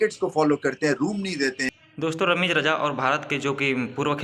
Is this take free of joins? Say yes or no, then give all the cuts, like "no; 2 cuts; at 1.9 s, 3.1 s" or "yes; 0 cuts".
yes; 0 cuts